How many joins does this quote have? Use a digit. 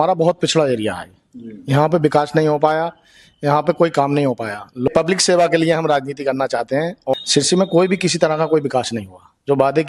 2